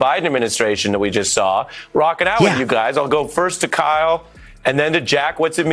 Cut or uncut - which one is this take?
uncut